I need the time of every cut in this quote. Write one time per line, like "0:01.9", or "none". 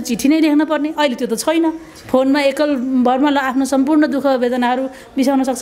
none